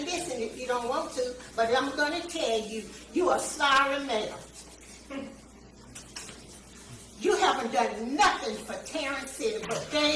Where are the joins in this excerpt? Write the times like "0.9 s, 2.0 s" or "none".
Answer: none